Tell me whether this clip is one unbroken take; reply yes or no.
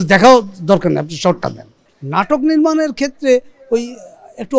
no